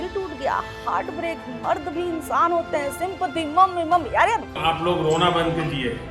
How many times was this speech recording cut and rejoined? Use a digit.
0